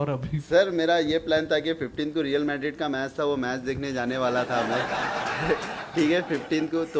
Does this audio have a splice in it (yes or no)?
no